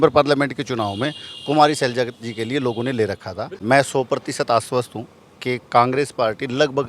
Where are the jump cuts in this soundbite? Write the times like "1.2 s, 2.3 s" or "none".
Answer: 3.5 s